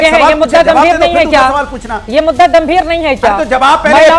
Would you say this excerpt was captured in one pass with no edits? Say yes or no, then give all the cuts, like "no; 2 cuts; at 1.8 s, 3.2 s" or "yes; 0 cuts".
yes; 0 cuts